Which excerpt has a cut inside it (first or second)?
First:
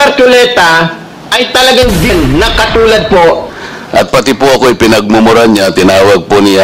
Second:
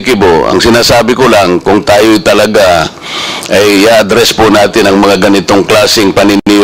first